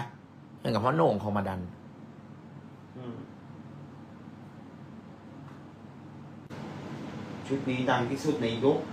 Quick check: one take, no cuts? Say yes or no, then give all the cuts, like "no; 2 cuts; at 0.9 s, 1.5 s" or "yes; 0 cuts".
no; 1 cut; at 6.5 s